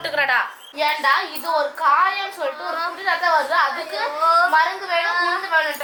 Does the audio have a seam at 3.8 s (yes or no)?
no